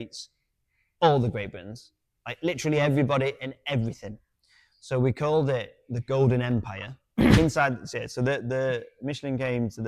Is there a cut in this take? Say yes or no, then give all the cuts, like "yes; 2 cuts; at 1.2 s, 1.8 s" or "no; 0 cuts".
yes; 1 cut; at 7.4 s